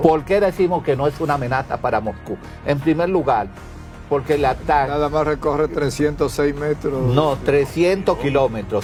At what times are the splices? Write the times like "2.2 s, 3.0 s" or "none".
none